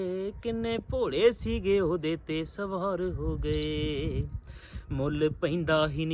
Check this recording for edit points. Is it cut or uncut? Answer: uncut